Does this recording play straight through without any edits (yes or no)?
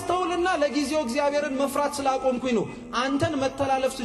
yes